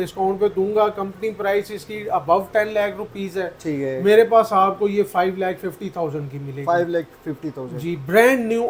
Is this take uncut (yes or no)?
yes